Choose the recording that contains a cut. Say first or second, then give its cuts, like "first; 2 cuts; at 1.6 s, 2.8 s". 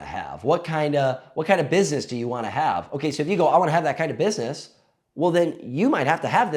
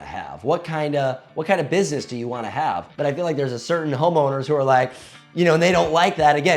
second; 1 cut; at 2.9 s